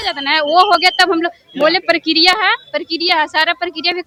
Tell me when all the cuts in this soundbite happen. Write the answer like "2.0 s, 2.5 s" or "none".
none